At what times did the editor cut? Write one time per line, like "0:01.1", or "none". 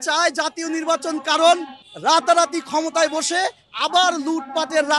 none